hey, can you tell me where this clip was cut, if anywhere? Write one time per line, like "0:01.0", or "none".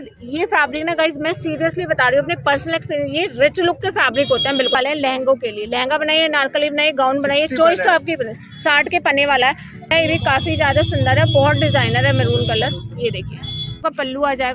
0:04.8
0:09.9
0:13.8